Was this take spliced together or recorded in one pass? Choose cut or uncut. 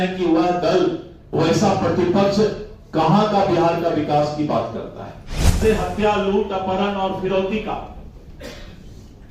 cut